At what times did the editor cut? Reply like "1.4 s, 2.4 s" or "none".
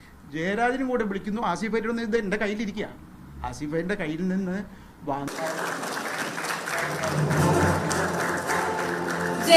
5.3 s